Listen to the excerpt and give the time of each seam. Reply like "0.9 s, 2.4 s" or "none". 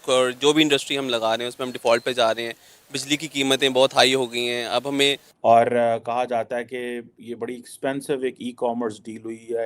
5.3 s